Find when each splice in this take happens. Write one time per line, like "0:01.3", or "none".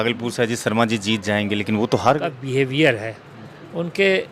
0:02.4